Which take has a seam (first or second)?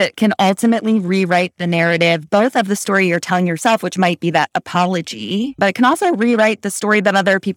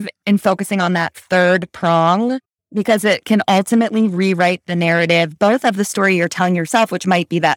first